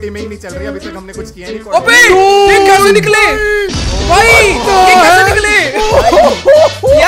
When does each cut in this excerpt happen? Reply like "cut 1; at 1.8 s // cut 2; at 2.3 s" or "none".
none